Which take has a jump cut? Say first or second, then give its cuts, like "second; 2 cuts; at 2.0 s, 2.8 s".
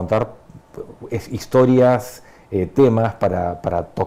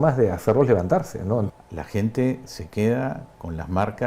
second; 1 cut; at 1.5 s